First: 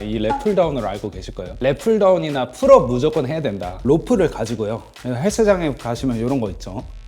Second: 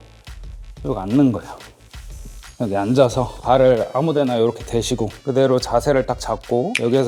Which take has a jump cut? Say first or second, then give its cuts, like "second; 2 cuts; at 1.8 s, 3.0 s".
first; 1 cut; at 3.7 s